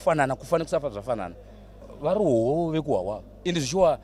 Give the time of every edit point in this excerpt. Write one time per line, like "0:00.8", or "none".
0:01.9